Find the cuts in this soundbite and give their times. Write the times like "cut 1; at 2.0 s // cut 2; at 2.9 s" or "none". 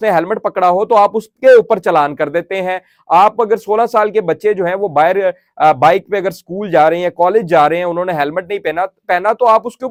none